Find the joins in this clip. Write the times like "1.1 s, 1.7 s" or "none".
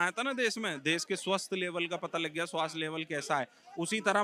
none